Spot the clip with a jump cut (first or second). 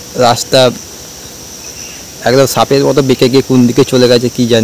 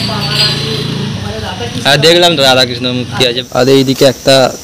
second